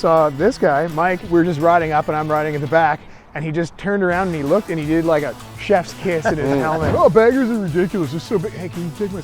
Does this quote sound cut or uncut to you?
cut